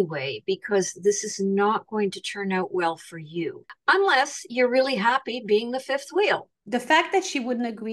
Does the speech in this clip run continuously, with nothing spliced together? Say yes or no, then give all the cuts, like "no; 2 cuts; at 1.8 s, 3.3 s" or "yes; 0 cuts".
no; 2 cuts; at 3.7 s, 6.5 s